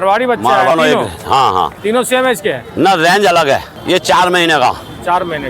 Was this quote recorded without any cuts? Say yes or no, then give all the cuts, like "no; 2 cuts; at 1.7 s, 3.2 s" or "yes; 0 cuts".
no; 2 cuts; at 0.7 s, 3.7 s